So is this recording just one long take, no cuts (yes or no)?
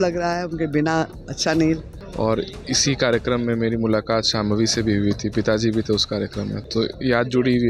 no